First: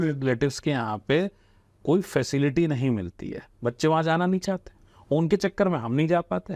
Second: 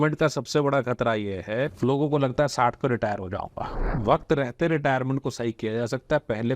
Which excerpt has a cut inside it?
second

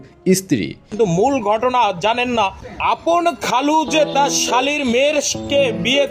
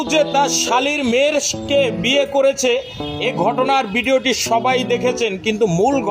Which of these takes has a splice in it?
first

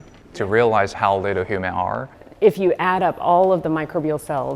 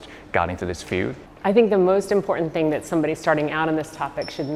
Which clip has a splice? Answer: first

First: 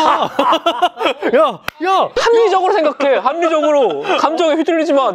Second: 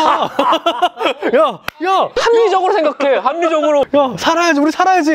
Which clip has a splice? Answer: second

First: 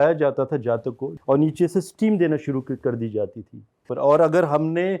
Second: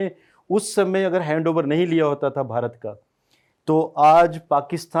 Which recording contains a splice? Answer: first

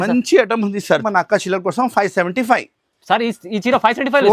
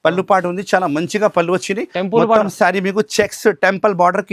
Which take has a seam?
first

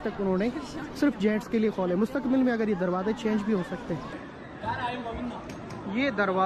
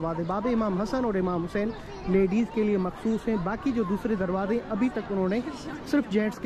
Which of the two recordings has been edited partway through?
first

